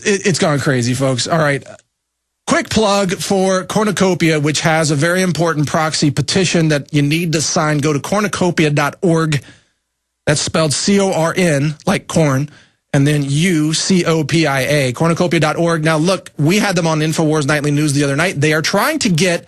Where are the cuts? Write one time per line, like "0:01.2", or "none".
none